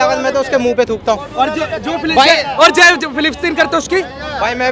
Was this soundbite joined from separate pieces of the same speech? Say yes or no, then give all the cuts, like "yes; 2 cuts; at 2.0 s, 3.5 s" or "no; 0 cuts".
no; 0 cuts